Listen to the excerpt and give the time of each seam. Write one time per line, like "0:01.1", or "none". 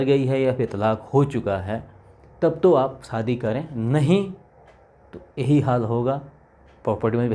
none